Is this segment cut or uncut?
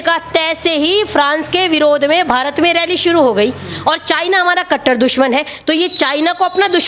uncut